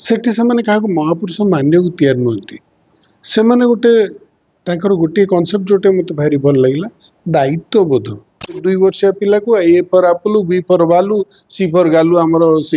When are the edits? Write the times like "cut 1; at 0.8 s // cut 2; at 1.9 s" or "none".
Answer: cut 1; at 8.6 s